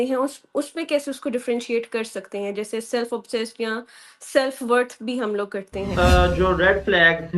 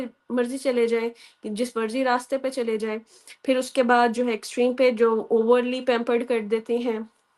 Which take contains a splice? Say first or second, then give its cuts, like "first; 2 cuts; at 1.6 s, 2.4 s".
first; 1 cut; at 5.9 s